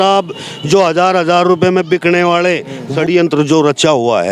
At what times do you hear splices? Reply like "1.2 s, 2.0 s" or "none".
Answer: 2.8 s